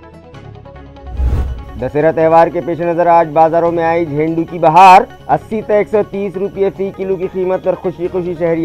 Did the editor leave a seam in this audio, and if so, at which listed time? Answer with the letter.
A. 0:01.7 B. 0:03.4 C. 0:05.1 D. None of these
D